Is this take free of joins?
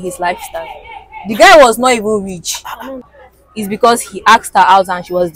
no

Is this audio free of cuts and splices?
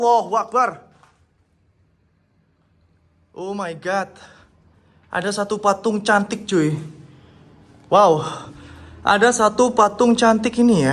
yes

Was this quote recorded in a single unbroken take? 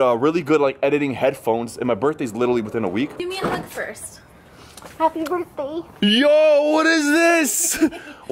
no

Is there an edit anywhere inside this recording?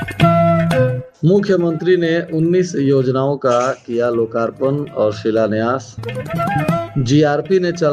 yes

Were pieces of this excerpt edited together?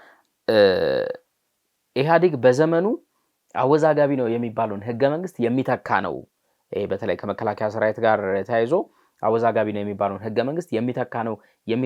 no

